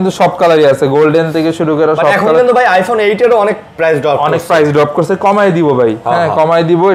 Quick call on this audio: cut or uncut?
uncut